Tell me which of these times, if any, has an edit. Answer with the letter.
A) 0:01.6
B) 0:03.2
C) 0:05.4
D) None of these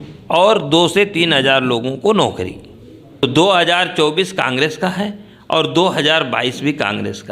B